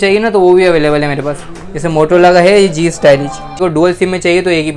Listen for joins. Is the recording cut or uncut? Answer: cut